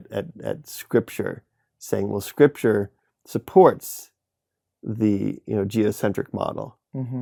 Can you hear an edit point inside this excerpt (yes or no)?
no